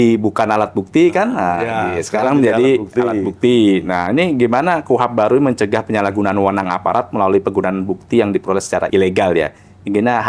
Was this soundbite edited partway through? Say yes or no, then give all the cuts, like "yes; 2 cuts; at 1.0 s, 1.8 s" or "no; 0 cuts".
no; 0 cuts